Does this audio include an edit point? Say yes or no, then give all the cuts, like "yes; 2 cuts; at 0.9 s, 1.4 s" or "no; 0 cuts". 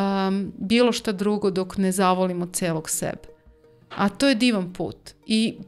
no; 0 cuts